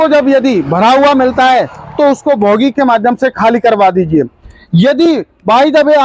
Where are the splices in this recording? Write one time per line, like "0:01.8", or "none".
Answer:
none